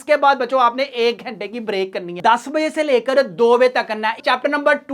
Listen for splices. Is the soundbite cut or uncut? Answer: cut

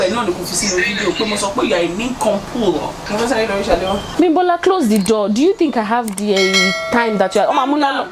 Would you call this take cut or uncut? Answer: uncut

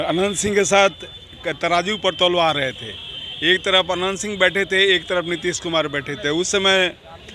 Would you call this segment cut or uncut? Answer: uncut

